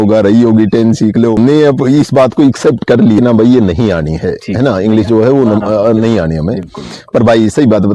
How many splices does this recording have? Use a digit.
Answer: 2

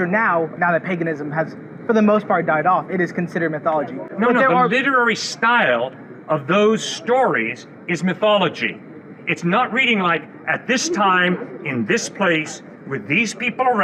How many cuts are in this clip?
0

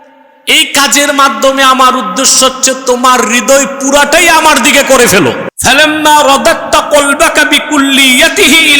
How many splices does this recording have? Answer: 1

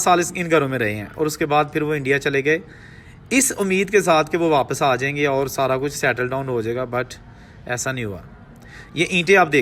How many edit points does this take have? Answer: 0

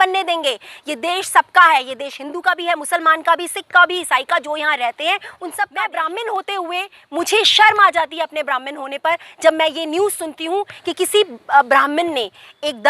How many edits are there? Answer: 1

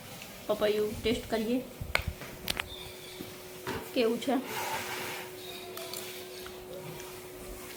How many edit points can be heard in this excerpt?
0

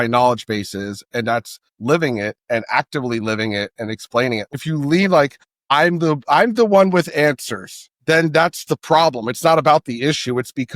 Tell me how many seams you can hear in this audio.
1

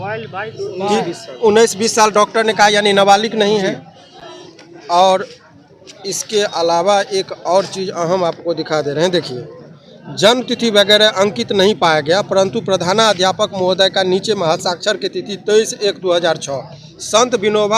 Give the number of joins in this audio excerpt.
0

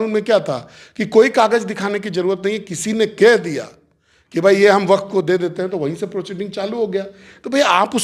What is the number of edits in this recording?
0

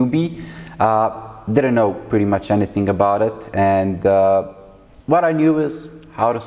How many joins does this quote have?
0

